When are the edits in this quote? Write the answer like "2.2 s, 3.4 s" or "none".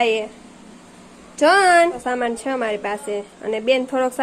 2.0 s